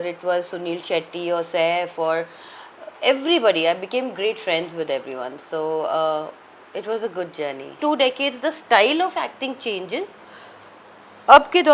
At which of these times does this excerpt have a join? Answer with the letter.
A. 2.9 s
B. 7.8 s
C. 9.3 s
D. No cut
B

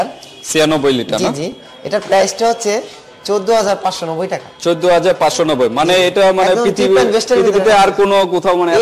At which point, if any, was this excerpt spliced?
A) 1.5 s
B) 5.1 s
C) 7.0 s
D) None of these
D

